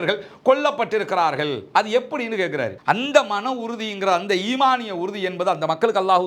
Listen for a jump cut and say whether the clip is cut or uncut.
cut